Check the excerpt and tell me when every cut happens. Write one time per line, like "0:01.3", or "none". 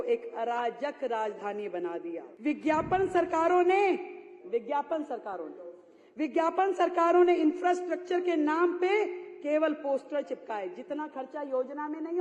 0:02.3